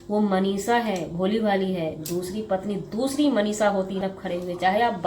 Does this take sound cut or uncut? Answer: cut